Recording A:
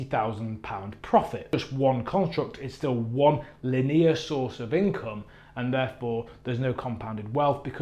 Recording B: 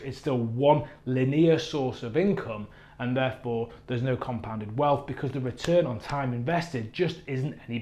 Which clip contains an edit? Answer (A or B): A